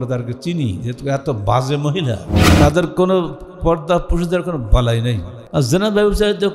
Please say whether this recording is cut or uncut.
cut